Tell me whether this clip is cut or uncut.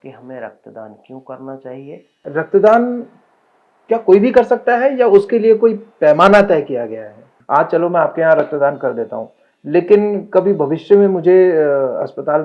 cut